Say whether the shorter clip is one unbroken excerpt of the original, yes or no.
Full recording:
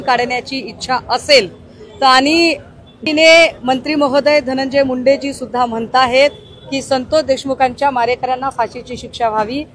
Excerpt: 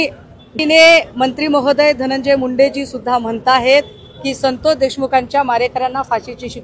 yes